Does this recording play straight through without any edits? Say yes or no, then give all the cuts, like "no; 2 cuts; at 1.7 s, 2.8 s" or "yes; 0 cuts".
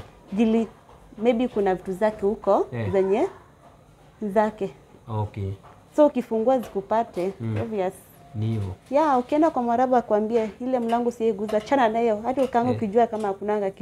yes; 0 cuts